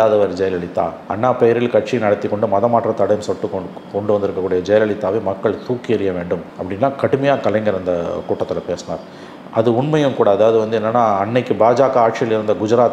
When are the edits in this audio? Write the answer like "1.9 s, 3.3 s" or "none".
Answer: none